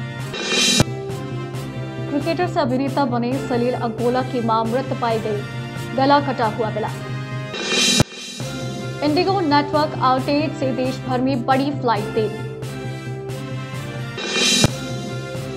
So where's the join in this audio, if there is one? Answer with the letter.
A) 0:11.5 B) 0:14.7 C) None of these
C